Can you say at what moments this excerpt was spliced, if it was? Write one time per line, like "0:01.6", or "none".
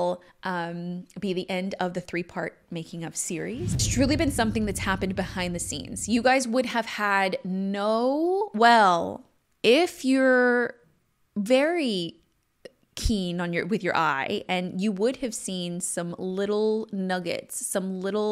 0:03.9